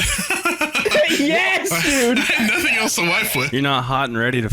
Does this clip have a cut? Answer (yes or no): yes